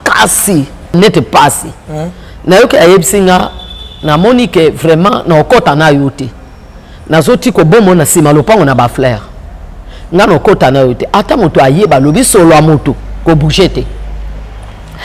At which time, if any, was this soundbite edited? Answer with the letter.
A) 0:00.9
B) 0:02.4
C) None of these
A